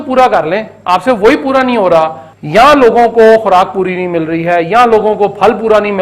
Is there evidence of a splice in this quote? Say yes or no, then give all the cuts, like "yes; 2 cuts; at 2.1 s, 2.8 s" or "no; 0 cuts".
yes; 1 cut; at 2.3 s